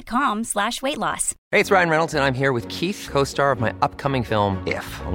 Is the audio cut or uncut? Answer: cut